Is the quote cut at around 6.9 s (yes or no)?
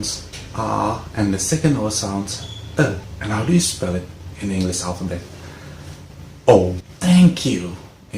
yes